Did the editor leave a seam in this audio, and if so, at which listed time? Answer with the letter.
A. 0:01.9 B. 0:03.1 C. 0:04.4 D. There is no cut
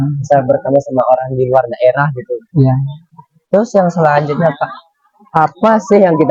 D